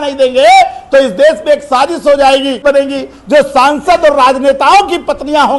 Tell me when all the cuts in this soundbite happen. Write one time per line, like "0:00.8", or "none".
0:02.6